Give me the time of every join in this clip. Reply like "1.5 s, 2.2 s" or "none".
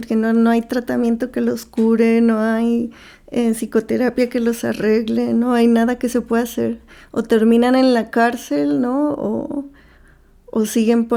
none